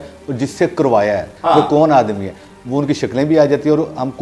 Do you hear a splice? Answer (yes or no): yes